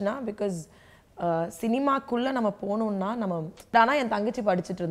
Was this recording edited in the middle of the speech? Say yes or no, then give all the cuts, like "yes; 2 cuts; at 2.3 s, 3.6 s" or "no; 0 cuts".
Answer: yes; 1 cut; at 3.7 s